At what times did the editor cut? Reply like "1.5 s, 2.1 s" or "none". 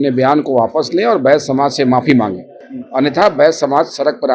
none